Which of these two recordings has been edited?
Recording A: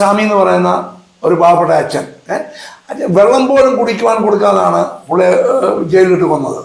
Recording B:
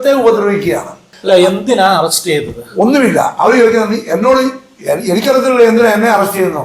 B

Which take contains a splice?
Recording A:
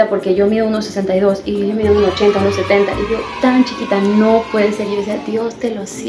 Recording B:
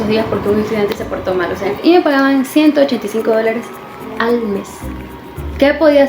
B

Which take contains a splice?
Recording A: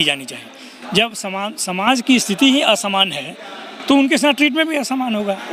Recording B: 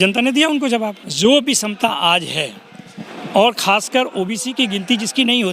B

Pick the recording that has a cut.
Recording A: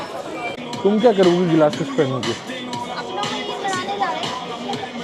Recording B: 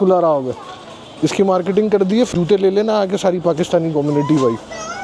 B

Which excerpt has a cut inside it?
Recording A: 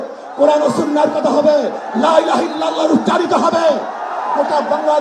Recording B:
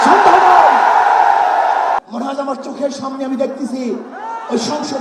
B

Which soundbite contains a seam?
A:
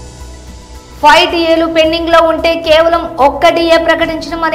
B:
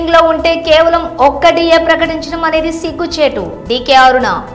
A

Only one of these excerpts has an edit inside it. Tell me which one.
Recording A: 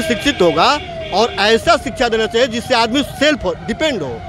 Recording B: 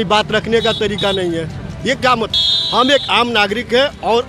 B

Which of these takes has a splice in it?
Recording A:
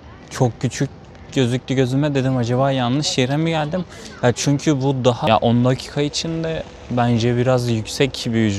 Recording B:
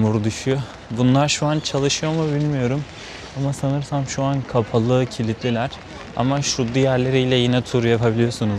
A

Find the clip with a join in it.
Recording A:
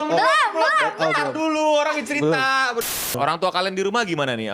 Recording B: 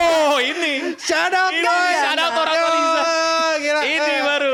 A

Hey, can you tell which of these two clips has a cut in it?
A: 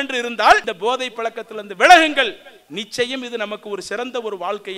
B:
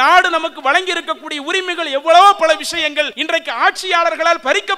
B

